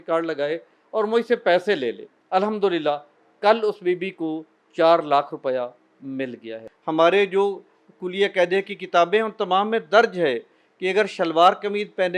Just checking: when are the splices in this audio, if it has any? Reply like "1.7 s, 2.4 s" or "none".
2.1 s, 6.7 s